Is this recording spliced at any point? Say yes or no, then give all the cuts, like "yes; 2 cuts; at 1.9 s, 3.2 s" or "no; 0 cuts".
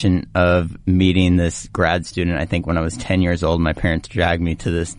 no; 0 cuts